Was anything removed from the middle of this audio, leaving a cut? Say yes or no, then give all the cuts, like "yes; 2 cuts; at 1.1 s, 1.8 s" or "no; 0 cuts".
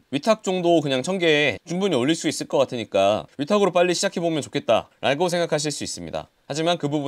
no; 0 cuts